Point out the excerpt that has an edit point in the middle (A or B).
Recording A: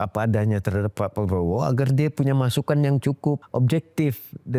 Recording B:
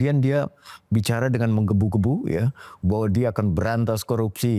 A